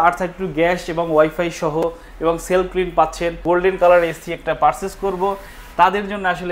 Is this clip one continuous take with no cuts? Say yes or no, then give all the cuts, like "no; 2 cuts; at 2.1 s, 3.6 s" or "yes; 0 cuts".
no; 1 cut; at 3.4 s